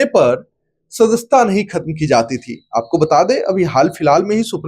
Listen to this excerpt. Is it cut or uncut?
uncut